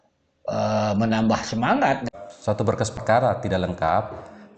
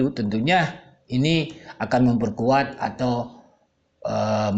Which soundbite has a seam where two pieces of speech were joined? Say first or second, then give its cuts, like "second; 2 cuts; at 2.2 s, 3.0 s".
first; 1 cut; at 2.0 s